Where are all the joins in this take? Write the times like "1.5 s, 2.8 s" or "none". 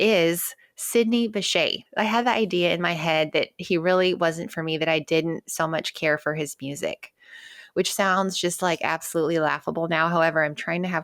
none

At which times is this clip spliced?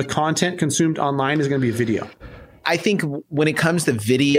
2.5 s

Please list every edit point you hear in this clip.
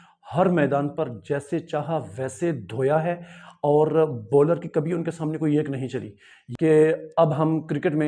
6.3 s

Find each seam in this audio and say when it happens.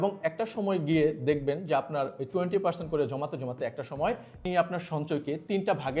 4.3 s

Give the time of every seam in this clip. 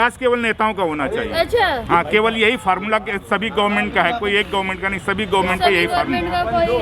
none

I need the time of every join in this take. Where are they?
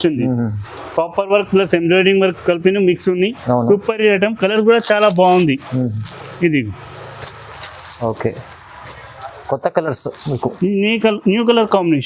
none

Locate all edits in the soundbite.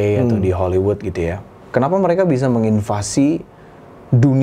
none

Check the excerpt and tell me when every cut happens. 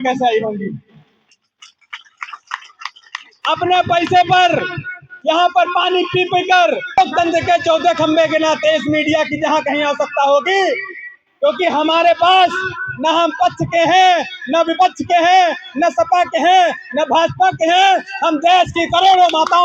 6.8 s

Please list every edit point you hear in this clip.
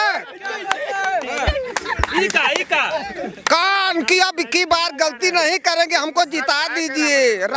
none

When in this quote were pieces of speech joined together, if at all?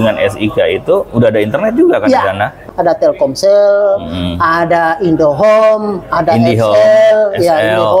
2.6 s

